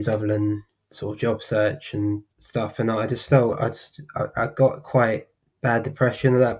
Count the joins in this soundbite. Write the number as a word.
one